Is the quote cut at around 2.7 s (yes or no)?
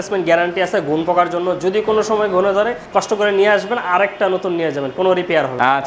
no